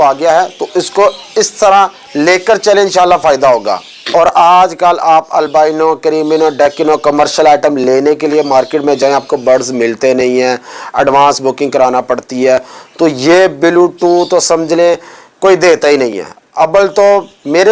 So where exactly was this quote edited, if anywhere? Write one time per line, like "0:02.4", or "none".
0:03.9